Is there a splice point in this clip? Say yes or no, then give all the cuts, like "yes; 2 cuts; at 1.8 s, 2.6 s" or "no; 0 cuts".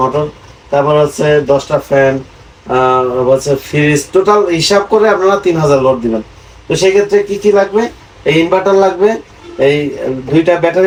no; 0 cuts